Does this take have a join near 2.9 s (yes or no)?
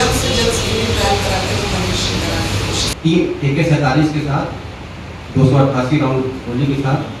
yes